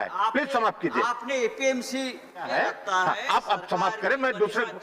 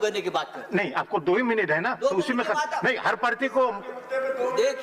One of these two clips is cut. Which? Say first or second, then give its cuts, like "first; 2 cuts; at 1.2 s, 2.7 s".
first; 1 cut; at 2.5 s